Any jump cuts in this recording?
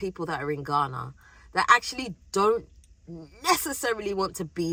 no; 0 cuts

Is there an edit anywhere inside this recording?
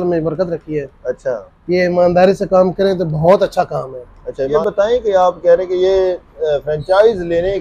yes; 1 cut; at 4.5 s

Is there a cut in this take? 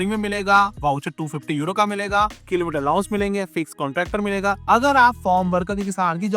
yes; 1 cut; at 4.6 s

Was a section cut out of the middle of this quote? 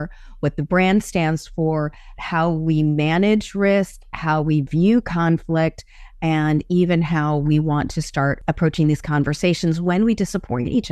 yes; 1 cut; at 8.4 s

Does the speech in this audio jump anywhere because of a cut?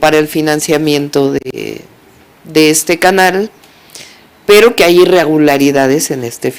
no; 0 cuts

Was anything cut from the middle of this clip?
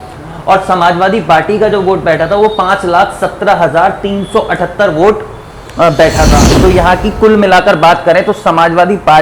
yes; 1 cut; at 6.5 s

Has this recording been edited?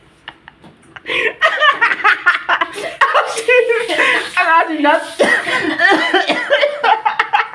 no; 0 cuts

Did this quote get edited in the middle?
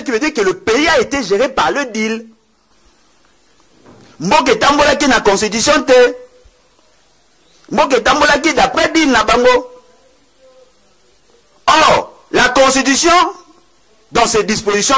no; 0 cuts

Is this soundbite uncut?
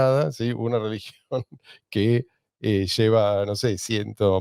yes; 0 cuts

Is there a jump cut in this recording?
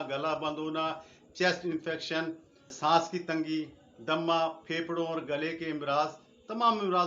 yes; 1 cut; at 2.7 s

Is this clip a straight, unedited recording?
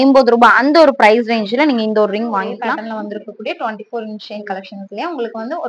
no; 1 cut; at 2.8 s

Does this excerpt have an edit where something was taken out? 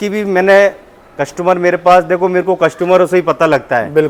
no; 0 cuts

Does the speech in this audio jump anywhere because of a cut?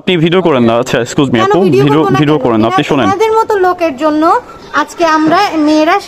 no; 0 cuts

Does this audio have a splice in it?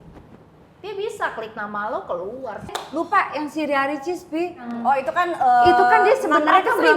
yes; 2 cuts; at 2.7 s, 4.7 s

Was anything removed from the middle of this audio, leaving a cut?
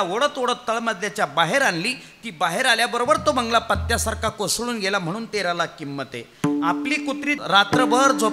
yes; 1 cut; at 7.4 s

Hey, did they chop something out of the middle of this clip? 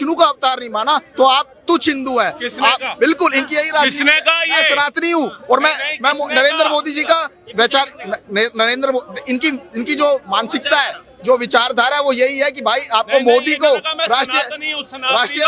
no; 0 cuts

